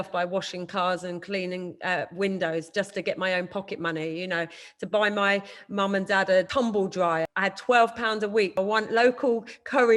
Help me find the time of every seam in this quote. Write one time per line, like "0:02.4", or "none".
0:06.5
0:07.3
0:08.6